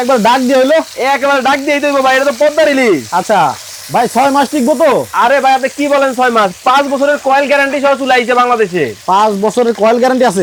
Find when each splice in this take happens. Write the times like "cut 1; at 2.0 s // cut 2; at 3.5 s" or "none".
none